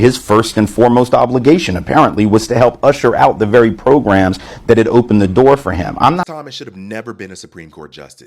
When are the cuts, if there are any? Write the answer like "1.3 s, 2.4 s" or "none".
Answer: 6.3 s